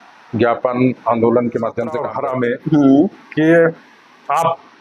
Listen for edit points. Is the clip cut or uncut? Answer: cut